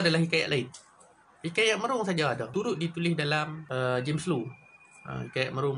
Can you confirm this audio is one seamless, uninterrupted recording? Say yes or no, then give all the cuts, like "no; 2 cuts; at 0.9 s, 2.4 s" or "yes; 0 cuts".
no; 2 cuts; at 2.4 s, 3.6 s